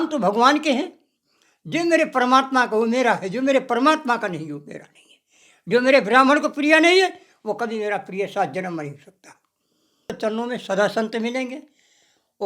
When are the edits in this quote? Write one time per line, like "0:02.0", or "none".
0:10.2